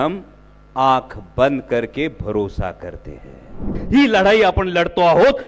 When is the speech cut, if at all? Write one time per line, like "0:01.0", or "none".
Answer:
0:03.8